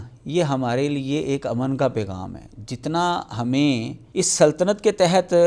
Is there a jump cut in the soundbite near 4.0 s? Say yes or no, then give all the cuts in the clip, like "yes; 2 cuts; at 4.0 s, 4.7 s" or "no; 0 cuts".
yes; 1 cut; at 4.0 s